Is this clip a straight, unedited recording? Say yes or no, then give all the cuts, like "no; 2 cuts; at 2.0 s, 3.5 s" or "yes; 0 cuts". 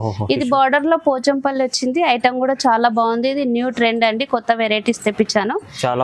yes; 0 cuts